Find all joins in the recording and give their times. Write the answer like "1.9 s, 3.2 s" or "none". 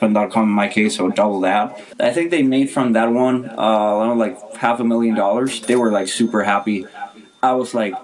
1.8 s